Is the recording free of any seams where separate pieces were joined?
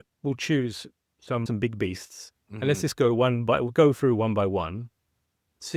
no; 1 cut; at 1.4 s

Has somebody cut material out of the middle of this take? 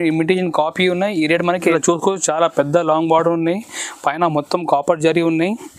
yes; 1 cut; at 1.6 s

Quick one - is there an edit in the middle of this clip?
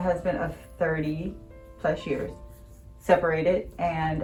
no; 0 cuts

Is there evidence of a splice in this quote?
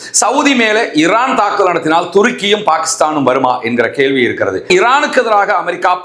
yes; 1 cut; at 4.6 s

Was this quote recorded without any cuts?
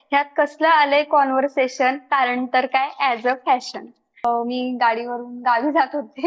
no; 1 cut; at 4.2 s

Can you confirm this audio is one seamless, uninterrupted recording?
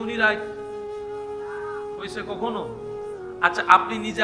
yes; 0 cuts

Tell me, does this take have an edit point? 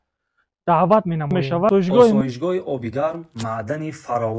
yes; 1 cut; at 2.2 s

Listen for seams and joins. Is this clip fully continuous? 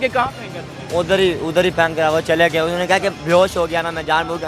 yes; 0 cuts

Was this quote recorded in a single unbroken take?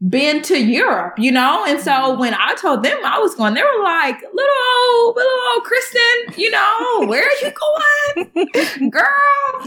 yes; 0 cuts

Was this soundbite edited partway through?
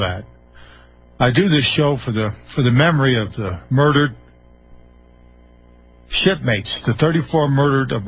yes; 1 cut; at 2.2 s

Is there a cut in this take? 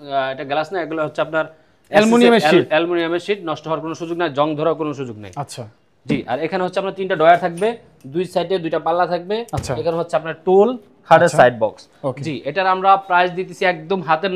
no; 0 cuts

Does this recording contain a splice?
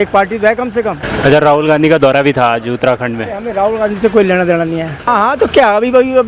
yes; 2 cuts; at 1.0 s, 5.1 s

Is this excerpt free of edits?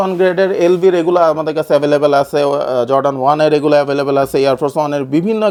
yes; 0 cuts

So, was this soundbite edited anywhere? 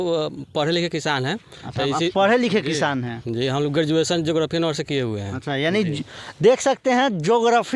no; 0 cuts

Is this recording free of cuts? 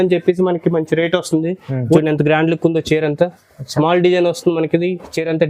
no; 1 cut; at 2.0 s

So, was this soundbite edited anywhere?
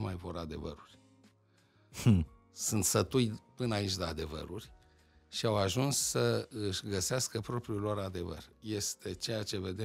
no; 0 cuts

